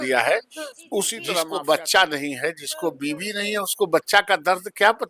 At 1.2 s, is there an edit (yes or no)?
yes